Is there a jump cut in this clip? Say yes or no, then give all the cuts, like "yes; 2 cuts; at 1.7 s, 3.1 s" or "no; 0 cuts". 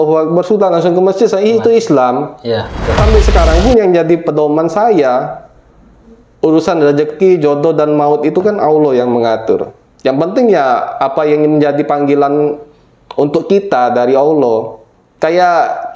yes; 1 cut; at 3.0 s